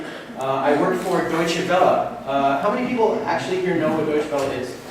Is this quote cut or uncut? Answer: cut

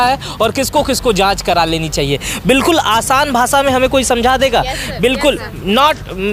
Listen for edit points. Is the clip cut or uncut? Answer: uncut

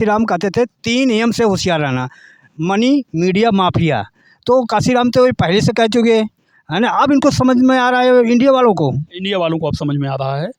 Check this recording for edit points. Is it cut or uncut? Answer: uncut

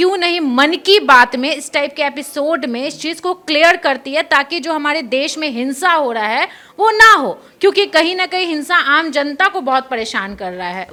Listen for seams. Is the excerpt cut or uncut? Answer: uncut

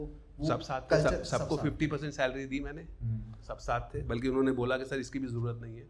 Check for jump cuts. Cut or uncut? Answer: uncut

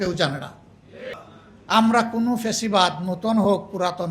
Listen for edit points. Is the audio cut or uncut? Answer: cut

